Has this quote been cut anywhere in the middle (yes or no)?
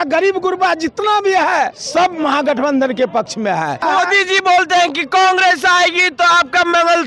yes